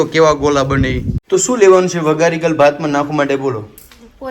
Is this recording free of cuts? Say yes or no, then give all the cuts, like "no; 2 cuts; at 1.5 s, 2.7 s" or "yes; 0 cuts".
no; 1 cut; at 1.1 s